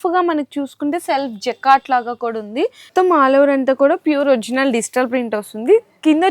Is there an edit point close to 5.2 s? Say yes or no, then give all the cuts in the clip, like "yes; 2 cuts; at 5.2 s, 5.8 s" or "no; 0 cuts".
no; 1 cut; at 2.8 s